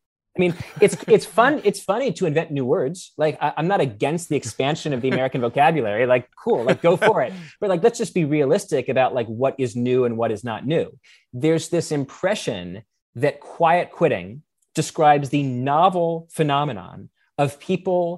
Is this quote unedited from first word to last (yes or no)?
yes